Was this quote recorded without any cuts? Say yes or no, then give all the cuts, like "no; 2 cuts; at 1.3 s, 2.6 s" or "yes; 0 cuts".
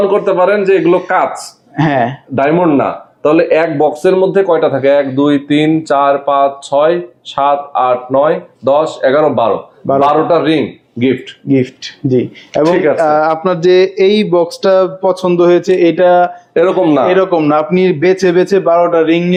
yes; 0 cuts